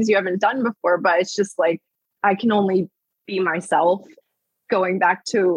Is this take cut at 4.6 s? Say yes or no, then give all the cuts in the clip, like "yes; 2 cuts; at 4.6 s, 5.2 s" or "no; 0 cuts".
no; 1 cut; at 2.2 s